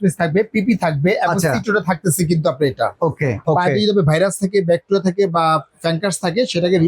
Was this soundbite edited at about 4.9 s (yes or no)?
no